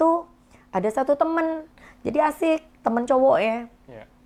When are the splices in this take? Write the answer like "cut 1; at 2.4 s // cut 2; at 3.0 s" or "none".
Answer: none